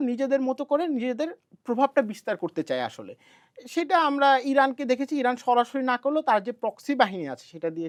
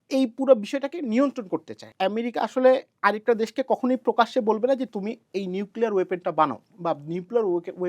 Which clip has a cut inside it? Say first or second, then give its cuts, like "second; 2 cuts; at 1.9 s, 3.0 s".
second; 1 cut; at 1.8 s